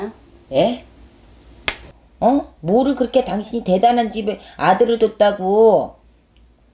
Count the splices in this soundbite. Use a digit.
1